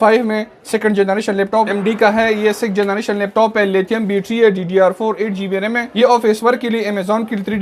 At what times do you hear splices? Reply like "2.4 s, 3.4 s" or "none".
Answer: 1.7 s, 5.9 s